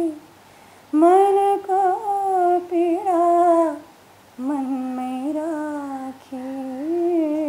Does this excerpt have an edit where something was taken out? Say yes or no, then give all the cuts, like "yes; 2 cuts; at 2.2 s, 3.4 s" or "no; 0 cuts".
no; 0 cuts